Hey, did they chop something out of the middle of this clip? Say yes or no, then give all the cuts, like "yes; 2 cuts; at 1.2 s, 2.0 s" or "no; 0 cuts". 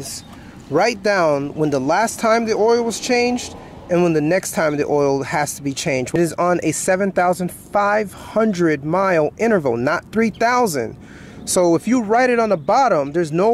yes; 1 cut; at 6.2 s